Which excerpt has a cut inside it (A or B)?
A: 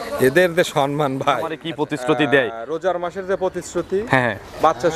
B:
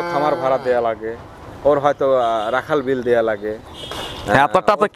A